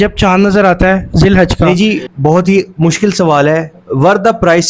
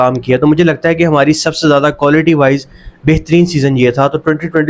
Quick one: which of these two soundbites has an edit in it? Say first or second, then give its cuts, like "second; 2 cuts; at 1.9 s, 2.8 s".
first; 1 cut; at 1.6 s